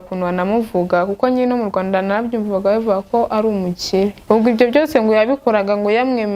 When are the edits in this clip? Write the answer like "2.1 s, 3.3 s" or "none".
4.2 s

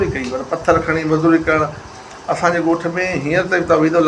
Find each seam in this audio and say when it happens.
1.9 s

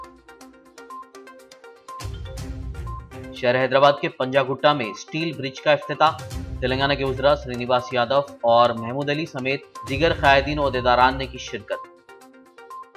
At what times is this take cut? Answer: none

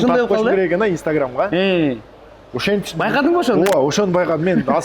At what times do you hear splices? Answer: none

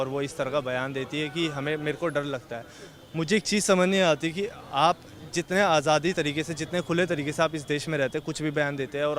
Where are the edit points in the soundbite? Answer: none

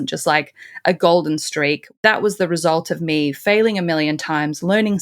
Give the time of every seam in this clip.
1.9 s

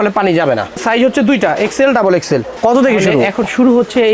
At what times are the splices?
2.5 s

